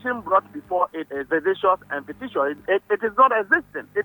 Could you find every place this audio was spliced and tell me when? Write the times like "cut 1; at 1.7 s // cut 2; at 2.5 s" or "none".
cut 1; at 1.1 s // cut 2; at 2.6 s